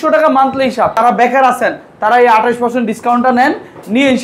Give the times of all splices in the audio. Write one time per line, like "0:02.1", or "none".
0:01.0